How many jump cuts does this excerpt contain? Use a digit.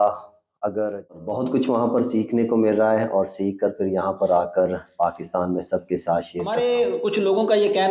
2